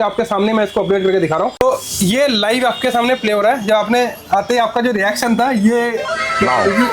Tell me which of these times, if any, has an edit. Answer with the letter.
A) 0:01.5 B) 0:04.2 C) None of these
A